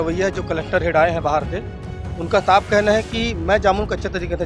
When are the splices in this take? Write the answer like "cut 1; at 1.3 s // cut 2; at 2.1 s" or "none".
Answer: none